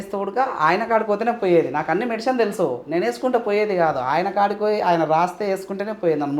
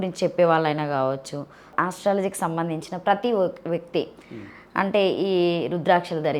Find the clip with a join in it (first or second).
second